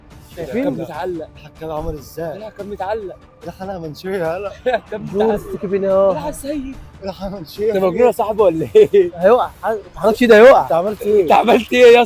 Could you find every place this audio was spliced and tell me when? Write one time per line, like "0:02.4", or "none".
none

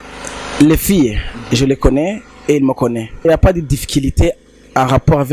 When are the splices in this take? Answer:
0:03.2

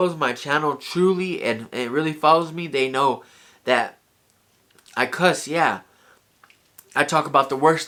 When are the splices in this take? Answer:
none

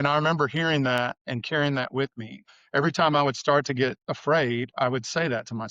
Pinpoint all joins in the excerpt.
0:01.2
0:02.5
0:04.1

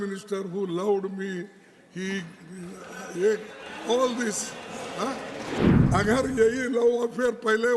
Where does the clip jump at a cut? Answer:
0:05.7

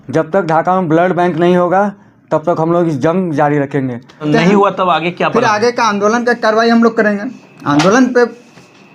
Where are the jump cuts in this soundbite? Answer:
0:04.2

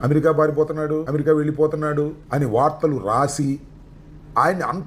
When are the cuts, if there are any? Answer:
0:01.1
0:02.2

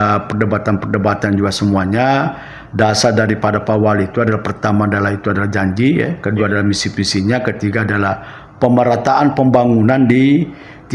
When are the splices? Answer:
none

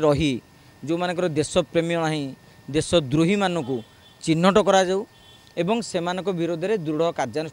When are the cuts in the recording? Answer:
none

